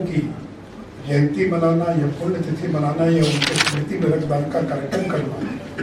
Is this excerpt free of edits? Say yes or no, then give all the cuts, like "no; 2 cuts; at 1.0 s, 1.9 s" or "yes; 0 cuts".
yes; 0 cuts